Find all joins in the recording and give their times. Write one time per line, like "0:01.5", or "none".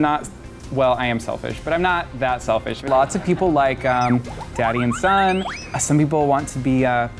0:02.8